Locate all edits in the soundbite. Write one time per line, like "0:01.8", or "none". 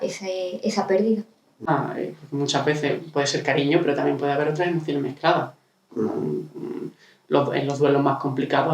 0:01.7